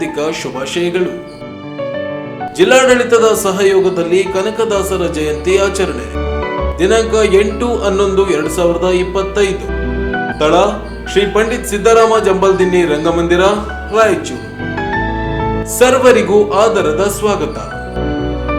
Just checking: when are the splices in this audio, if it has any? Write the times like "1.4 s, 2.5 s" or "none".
none